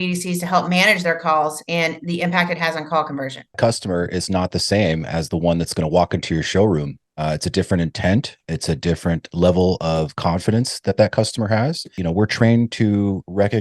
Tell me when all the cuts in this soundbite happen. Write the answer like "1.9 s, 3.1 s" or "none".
3.6 s, 12.0 s